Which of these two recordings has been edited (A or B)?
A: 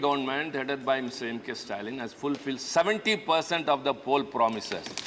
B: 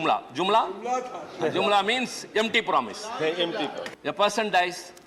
B